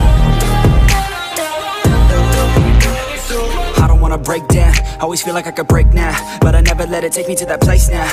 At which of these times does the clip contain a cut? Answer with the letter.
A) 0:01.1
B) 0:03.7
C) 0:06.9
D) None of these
B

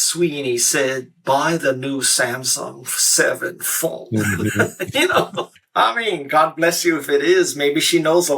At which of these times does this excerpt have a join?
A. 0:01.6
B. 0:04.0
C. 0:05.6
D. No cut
C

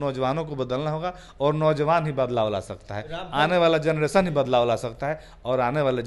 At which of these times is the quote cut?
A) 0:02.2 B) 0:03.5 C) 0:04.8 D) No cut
D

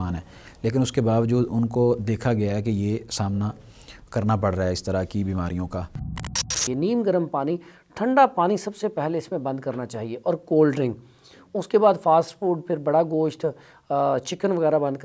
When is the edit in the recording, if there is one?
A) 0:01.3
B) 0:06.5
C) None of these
B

